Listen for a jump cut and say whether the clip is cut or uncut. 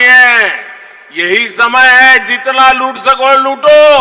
uncut